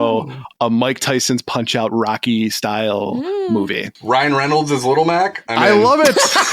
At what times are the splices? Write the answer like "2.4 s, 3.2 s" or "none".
3.9 s